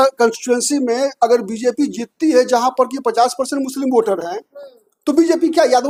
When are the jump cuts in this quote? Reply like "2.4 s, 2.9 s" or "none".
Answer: none